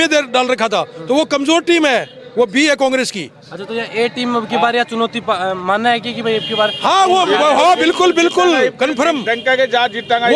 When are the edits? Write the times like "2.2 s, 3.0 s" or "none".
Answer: none